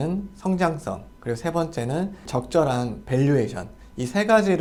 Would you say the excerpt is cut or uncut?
uncut